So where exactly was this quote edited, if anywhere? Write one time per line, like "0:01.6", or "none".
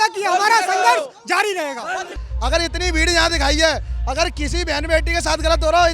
0:02.2